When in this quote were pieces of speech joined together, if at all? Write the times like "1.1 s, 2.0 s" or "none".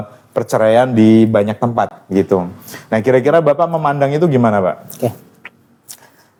none